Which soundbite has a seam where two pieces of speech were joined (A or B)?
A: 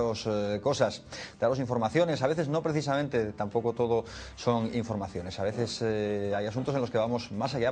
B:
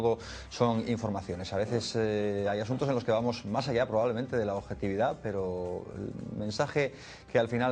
B